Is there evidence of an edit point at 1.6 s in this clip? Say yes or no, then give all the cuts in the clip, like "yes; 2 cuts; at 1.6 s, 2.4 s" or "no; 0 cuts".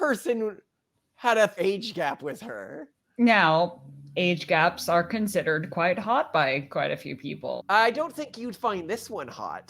yes; 2 cuts; at 1.6 s, 7.6 s